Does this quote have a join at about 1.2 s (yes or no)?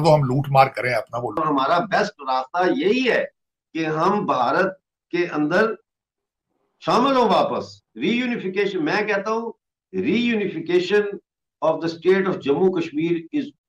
yes